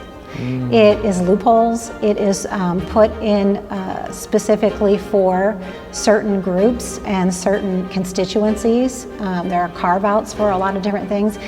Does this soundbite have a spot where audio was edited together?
no; 0 cuts

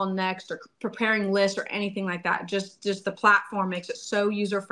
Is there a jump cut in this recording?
no; 0 cuts

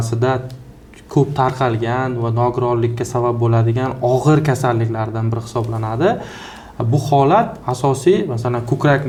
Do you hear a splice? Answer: no; 0 cuts

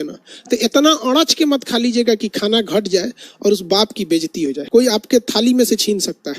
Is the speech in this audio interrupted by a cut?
yes; 1 cut; at 4.9 s

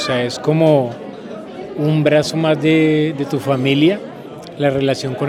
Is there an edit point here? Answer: no; 0 cuts

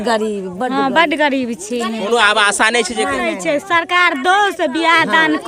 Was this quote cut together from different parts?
no; 0 cuts

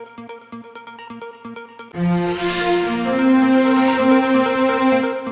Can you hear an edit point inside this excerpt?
yes; 1 cut; at 1.0 s

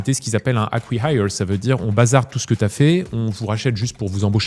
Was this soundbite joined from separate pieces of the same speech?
no; 0 cuts

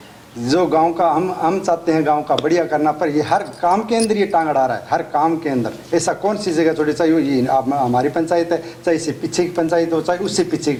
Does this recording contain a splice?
no; 0 cuts

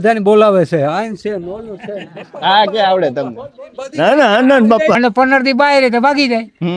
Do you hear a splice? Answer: yes; 1 cut; at 4.9 s

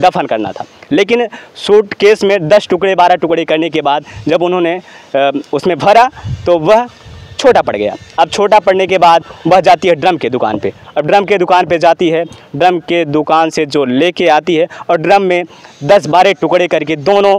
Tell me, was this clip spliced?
no; 0 cuts

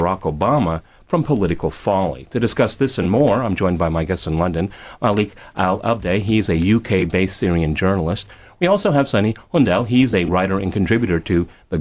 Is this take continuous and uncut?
yes; 0 cuts

